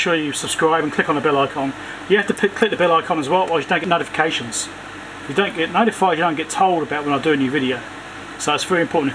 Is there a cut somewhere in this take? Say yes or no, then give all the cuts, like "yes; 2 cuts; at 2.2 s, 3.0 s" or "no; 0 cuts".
no; 0 cuts